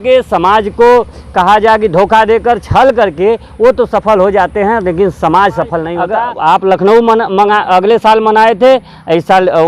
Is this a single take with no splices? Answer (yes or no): no